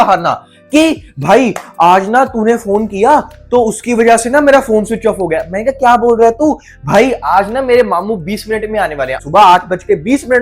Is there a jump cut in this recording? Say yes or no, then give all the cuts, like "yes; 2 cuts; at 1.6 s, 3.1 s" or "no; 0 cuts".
yes; 1 cut; at 9.2 s